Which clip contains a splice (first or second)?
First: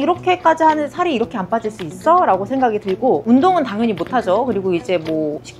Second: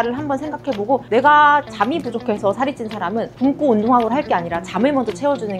first